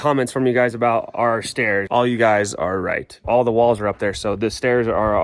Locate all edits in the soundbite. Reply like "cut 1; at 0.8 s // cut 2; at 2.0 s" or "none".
cut 1; at 1.9 s // cut 2; at 3.2 s